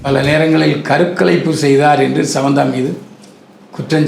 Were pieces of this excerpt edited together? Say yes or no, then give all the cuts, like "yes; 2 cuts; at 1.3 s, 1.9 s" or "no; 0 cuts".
no; 0 cuts